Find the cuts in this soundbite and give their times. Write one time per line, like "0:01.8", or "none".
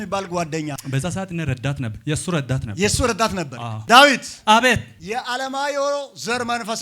0:03.8

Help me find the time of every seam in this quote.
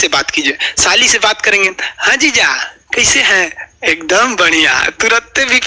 none

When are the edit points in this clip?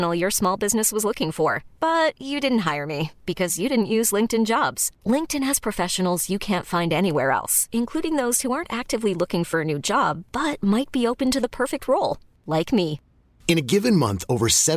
none

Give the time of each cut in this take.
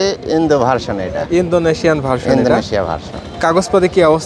none

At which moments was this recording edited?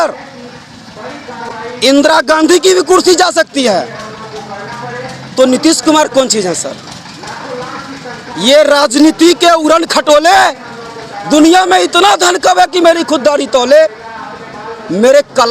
none

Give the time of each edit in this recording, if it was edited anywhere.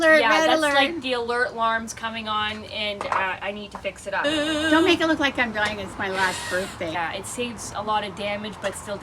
0:04.2
0:06.9

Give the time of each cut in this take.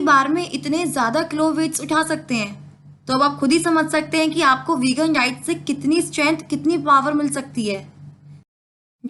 none

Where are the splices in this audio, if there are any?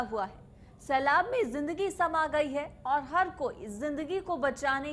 none

